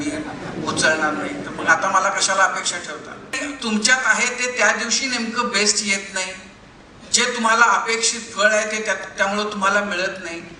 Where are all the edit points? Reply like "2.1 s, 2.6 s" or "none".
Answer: 3.4 s